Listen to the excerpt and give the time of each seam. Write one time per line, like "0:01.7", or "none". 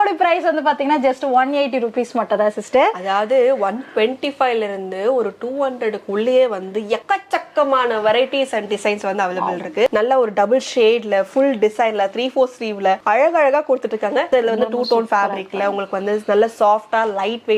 0:09.9
0:14.3